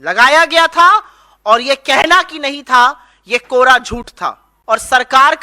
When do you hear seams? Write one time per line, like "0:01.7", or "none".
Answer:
0:04.5